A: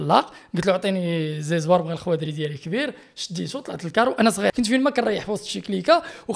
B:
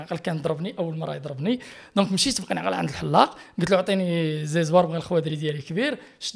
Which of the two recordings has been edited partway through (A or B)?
A